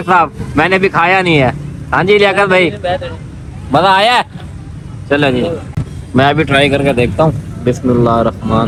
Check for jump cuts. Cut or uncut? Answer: uncut